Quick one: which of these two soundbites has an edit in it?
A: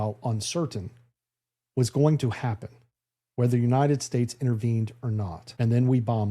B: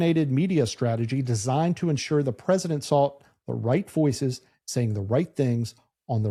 A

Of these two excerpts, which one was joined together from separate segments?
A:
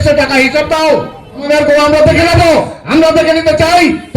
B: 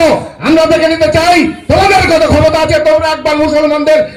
A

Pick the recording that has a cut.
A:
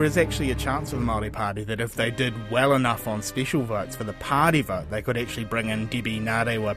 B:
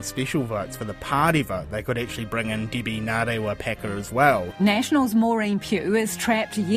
B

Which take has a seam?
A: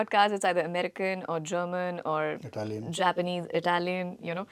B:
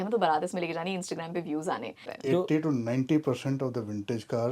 B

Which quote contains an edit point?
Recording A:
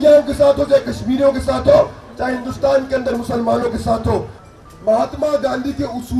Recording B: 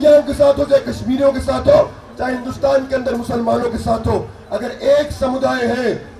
A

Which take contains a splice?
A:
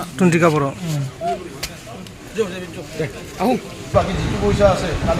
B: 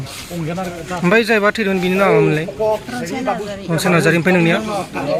A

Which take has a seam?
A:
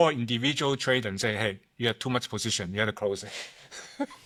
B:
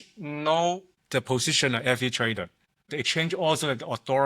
B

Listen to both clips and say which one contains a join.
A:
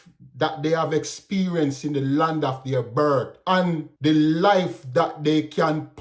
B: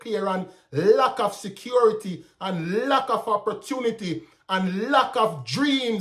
A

